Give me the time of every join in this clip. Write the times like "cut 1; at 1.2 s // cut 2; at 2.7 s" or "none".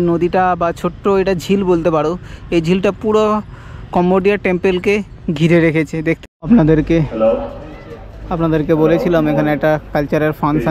cut 1; at 6.2 s